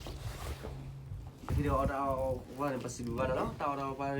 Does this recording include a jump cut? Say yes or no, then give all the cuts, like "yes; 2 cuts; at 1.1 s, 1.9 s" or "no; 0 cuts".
yes; 1 cut; at 1.5 s